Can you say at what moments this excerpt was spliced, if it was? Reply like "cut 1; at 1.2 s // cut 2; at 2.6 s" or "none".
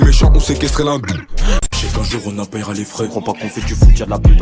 cut 1; at 1.6 s